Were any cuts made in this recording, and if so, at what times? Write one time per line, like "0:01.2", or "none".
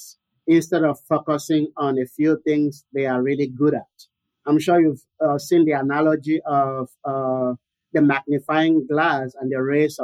none